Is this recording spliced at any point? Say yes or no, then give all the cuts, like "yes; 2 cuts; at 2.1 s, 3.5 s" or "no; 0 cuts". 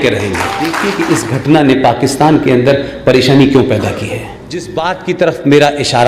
yes; 2 cuts; at 0.9 s, 4.7 s